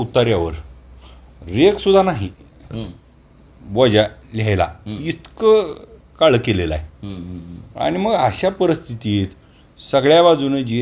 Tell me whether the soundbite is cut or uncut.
uncut